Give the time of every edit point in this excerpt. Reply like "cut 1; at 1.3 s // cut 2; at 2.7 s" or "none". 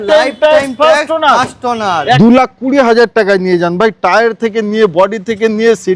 cut 1; at 2.2 s